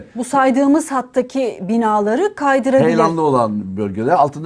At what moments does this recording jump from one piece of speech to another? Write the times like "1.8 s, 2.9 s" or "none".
none

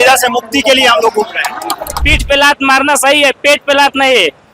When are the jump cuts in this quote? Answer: 2.0 s

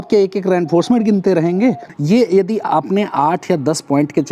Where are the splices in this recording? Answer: 1.9 s

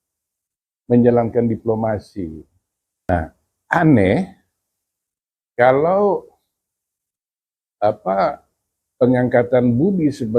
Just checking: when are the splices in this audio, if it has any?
3.1 s

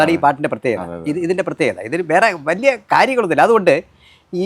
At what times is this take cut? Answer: none

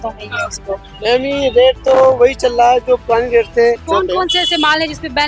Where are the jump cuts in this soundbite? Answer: 0.9 s, 3.8 s

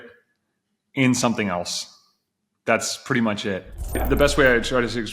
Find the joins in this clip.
4.0 s

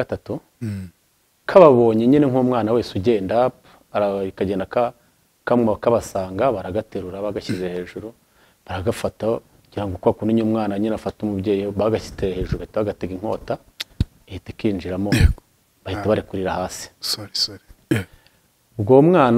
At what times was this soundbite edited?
none

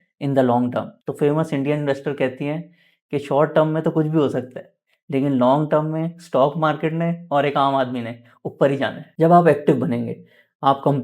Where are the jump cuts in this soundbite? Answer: 1.0 s, 9.0 s

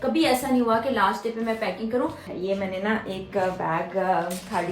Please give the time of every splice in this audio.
2.2 s

